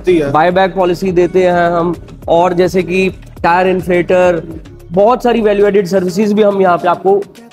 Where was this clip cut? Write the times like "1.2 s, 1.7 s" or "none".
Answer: none